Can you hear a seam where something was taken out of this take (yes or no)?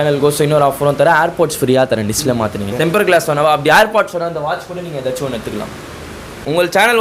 yes